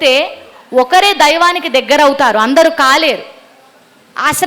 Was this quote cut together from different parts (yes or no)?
no